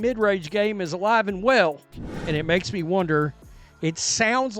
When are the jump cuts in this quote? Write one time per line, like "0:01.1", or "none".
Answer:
0:02.1